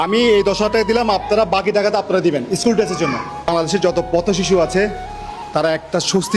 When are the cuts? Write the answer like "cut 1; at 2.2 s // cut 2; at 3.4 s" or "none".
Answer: cut 1; at 3.5 s